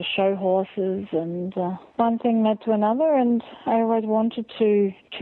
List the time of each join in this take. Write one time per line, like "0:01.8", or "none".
0:01.8